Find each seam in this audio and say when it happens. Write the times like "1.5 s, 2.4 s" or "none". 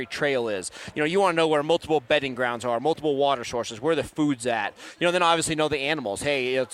none